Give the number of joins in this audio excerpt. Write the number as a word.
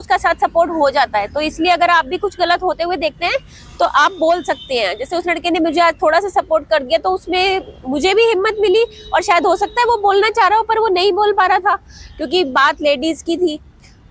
zero